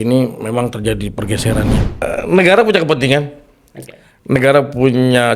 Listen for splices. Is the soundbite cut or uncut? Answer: cut